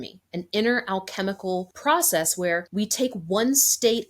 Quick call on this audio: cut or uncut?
cut